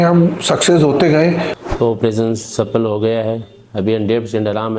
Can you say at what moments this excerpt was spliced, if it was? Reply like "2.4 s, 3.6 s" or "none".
1.6 s

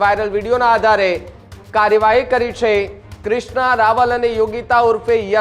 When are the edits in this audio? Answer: none

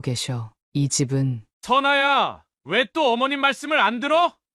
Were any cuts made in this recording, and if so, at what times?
1.5 s

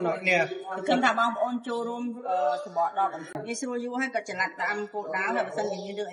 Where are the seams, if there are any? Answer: 3.3 s

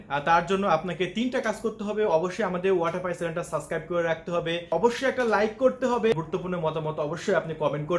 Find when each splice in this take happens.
4.7 s, 6.1 s

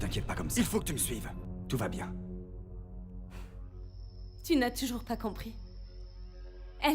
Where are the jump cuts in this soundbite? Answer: 2.8 s

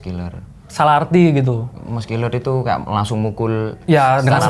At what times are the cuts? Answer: 1.7 s

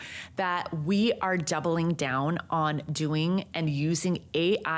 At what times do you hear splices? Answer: none

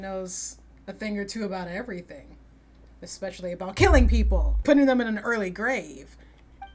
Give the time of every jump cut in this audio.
none

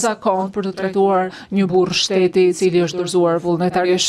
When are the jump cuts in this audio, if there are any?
none

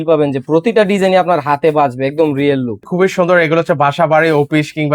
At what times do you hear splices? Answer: 2.8 s

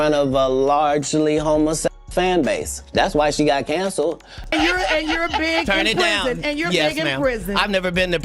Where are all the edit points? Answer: 1.9 s, 4.4 s

